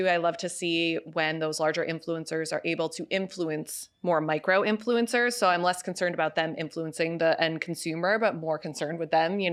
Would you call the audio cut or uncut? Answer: uncut